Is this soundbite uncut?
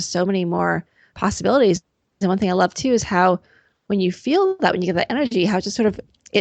yes; 0 cuts

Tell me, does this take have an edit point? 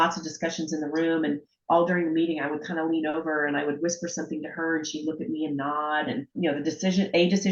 yes; 1 cut; at 6.3 s

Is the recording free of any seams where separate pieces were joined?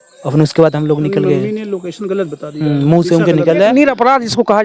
no; 1 cut; at 3.7 s

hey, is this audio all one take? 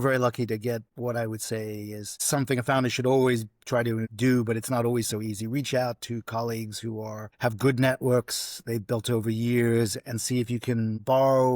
no; 3 cuts; at 0.9 s, 2.1 s, 4.1 s

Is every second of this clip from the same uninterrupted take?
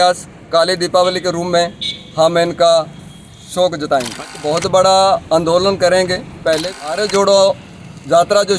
no; 2 cuts; at 4.4 s, 6.8 s

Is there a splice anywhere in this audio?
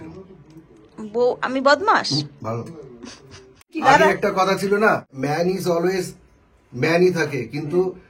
yes; 2 cuts; at 3.7 s, 5.1 s

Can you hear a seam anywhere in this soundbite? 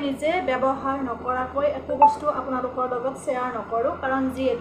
no; 0 cuts

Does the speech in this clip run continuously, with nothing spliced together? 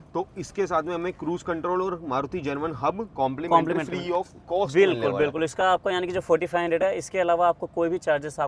yes; 0 cuts

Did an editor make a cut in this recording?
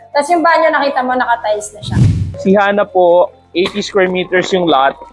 yes; 1 cut; at 1.8 s

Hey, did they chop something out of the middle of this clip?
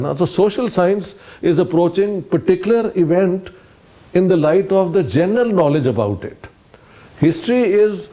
no; 0 cuts

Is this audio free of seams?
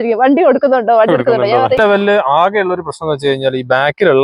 no; 1 cut; at 1.8 s

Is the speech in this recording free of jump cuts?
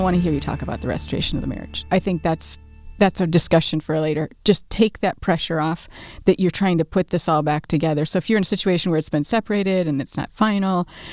yes; 0 cuts

